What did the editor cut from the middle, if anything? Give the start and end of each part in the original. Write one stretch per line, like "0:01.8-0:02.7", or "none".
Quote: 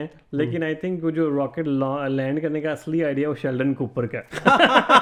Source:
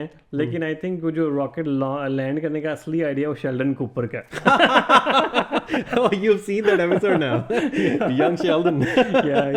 none